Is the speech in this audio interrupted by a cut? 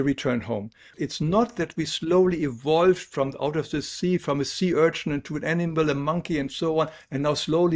yes; 1 cut; at 0.9 s

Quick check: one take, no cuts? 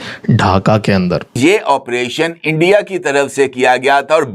no; 1 cut; at 1.4 s

